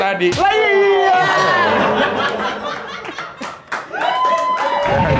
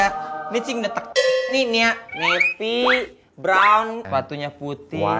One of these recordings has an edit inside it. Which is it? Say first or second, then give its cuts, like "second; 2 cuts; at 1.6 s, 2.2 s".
second; 2 cuts; at 1.5 s, 4.0 s